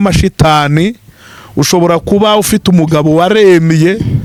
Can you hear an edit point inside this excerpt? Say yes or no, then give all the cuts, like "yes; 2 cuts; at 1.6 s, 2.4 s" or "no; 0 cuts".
no; 0 cuts